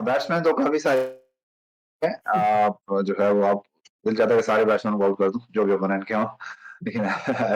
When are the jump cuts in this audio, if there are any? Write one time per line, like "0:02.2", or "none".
none

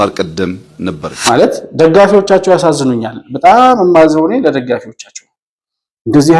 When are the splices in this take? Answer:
0:01.1

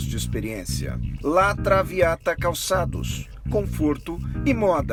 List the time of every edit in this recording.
none

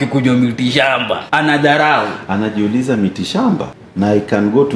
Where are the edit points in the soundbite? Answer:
0:01.2
0:03.8

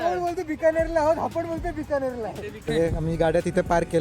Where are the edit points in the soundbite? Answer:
0:02.7

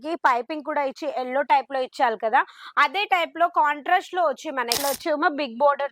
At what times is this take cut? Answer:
0:04.8

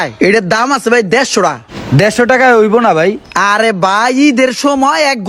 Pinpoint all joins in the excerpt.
none

